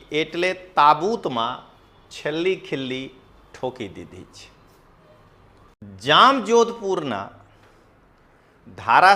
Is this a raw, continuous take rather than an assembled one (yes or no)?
no